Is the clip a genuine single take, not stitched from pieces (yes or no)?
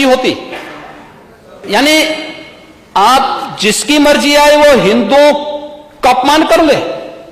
no